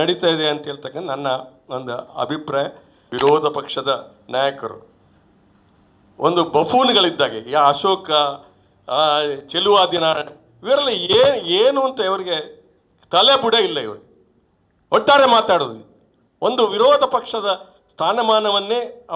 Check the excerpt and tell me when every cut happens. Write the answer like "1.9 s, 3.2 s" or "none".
3.0 s